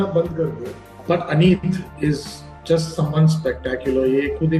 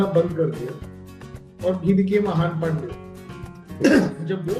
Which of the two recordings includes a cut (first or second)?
first